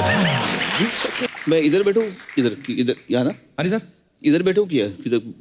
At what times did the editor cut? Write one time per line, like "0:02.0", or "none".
0:01.4